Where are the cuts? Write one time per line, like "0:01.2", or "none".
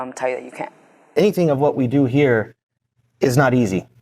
0:01.1